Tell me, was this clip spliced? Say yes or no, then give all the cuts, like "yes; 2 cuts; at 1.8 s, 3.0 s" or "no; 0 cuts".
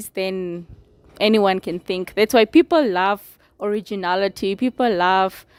no; 0 cuts